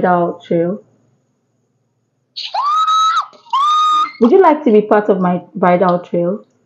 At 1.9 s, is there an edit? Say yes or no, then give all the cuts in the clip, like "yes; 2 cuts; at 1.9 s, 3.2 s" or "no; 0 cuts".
yes; 2 cuts; at 1.9 s, 4.0 s